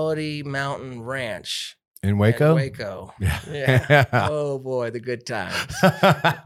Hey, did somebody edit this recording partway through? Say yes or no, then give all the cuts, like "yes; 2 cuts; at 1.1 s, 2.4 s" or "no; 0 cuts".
no; 0 cuts